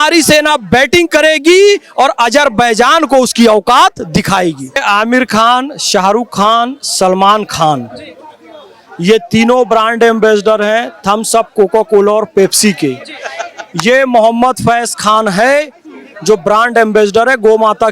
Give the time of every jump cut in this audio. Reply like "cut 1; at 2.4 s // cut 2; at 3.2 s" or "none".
cut 1; at 4.8 s